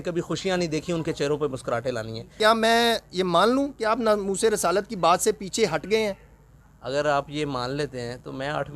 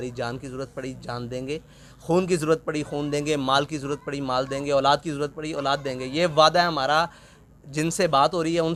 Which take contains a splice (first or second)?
first